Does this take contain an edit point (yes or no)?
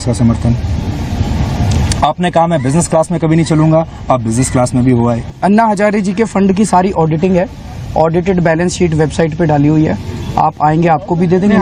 yes